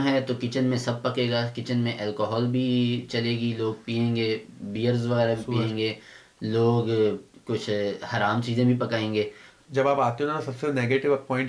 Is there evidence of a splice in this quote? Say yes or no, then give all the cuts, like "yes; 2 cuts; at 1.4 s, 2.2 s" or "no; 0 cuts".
yes; 1 cut; at 9.6 s